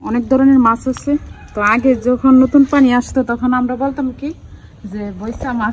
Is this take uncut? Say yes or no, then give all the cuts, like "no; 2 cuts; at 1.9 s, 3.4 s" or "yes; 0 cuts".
yes; 0 cuts